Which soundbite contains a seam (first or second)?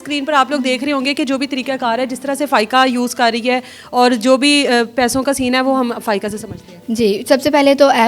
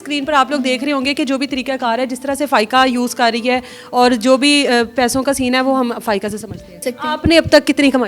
second